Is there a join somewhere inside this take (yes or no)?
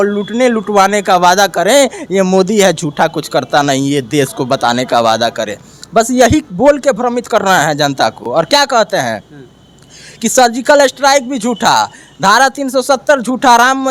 no